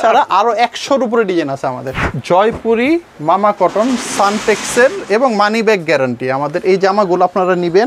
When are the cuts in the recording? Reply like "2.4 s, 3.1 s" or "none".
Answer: 2.1 s

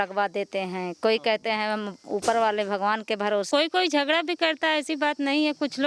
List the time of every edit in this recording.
3.5 s

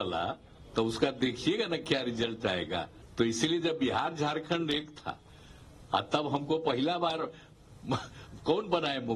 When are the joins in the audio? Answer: 3.0 s

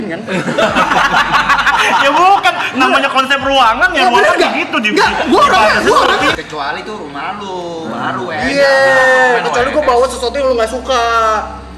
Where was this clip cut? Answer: 6.4 s

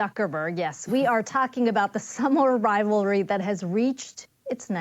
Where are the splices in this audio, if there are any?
none

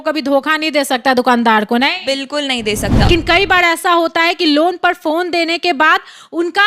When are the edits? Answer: 3.1 s

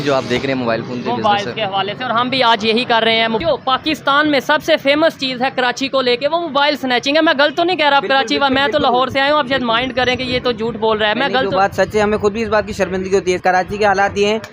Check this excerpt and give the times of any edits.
3.4 s, 13.4 s

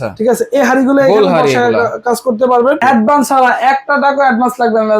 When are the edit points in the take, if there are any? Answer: 2.8 s

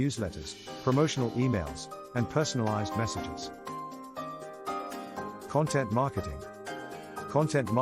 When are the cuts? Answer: 3.2 s, 5.5 s

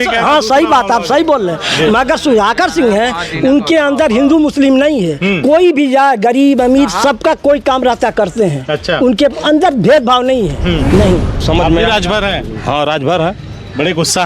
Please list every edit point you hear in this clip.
11.4 s

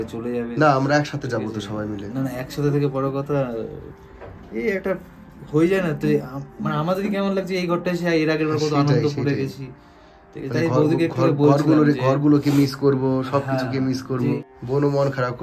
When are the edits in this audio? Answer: 14.4 s

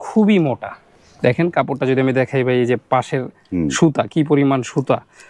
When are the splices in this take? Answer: 1.0 s

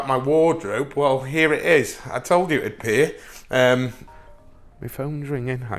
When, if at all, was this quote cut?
4.1 s

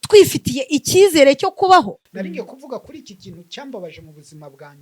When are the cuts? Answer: 2.0 s

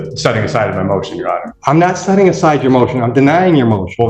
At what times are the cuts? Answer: 1.5 s

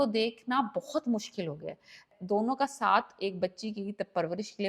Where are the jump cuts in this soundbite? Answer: 2.1 s

